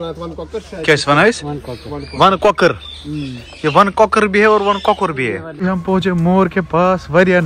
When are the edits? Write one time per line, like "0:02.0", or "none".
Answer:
0:05.5